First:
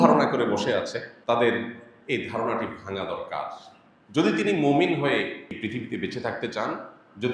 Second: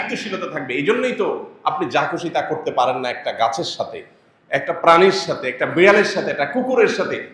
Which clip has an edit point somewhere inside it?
first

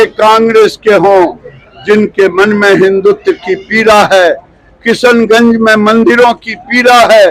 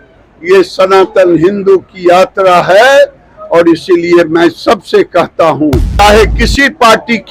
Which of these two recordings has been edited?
second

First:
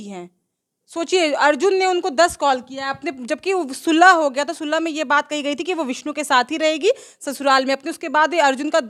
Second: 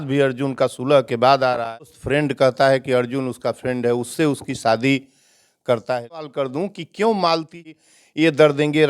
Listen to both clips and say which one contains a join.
second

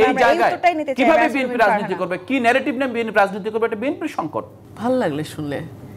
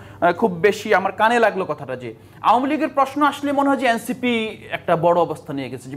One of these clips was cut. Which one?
first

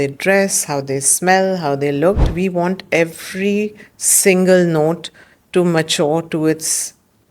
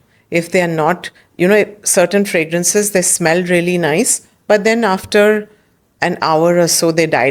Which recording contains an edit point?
first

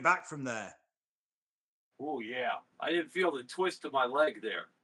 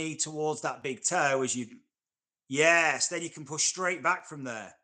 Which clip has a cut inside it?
first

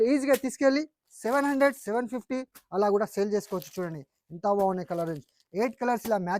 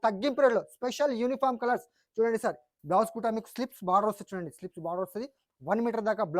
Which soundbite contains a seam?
second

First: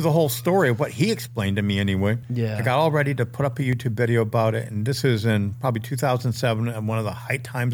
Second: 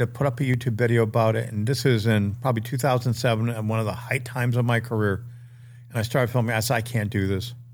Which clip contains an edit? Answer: first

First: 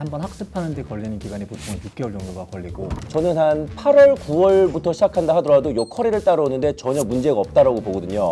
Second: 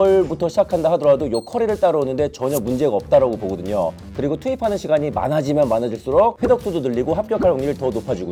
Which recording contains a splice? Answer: first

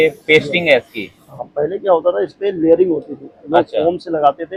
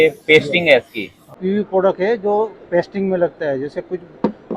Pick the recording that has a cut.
second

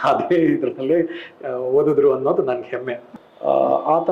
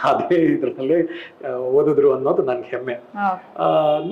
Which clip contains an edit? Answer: first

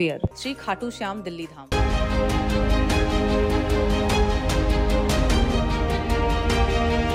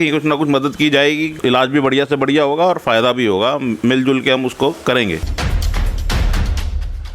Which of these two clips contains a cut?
second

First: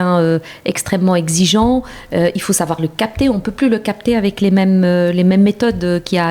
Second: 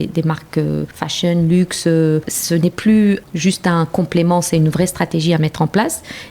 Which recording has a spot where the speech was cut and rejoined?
second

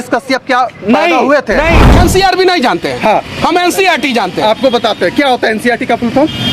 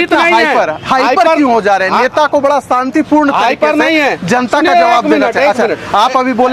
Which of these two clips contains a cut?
first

